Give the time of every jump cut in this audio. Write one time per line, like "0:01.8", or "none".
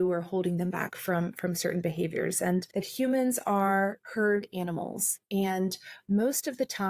0:02.7